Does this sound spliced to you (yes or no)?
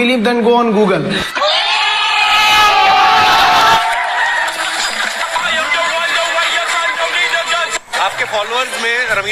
no